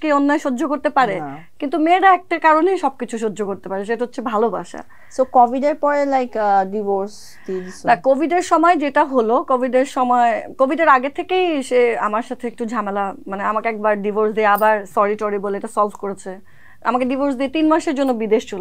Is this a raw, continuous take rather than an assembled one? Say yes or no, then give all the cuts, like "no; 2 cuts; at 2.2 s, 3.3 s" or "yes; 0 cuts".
yes; 0 cuts